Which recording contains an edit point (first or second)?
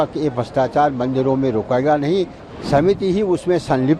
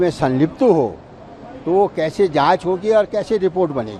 first